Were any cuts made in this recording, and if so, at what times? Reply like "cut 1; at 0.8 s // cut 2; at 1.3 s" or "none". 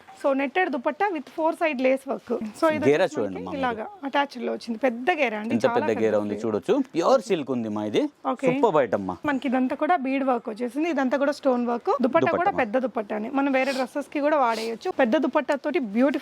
cut 1; at 2.5 s // cut 2; at 9.2 s // cut 3; at 12.0 s // cut 4; at 14.8 s